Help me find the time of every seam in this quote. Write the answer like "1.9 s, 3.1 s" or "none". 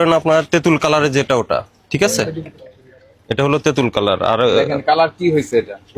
none